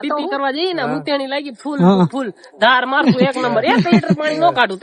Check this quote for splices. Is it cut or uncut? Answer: uncut